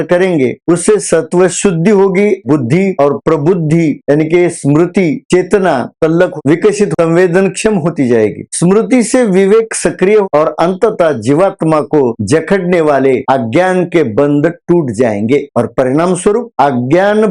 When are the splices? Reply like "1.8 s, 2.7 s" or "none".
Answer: 2.4 s, 6.6 s, 10.3 s